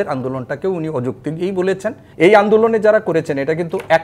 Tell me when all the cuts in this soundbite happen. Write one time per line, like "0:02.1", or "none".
0:02.0